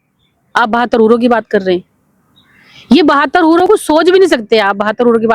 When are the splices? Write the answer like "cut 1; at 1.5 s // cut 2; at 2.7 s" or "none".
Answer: none